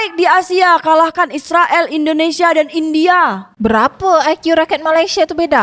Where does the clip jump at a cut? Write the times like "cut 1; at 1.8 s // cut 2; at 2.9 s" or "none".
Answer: none